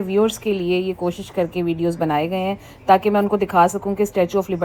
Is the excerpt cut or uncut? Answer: uncut